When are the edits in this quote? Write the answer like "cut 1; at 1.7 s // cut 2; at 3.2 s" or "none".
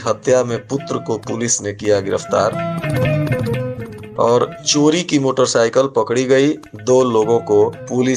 none